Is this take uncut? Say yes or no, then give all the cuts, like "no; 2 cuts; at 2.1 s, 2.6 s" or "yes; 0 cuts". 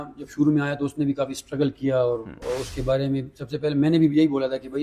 yes; 0 cuts